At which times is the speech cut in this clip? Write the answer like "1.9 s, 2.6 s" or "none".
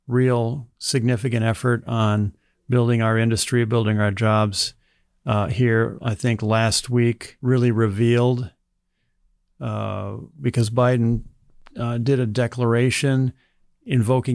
7.3 s